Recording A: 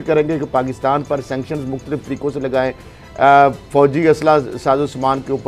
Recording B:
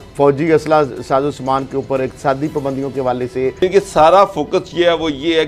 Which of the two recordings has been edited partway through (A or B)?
B